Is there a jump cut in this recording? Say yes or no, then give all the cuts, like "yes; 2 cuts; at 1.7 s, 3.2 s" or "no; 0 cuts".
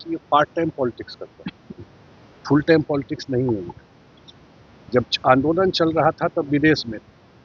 no; 0 cuts